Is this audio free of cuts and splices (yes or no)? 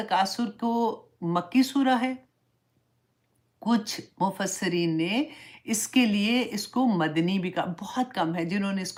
yes